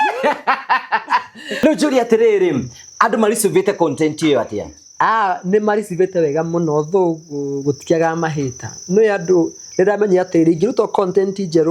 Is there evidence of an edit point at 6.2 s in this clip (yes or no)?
no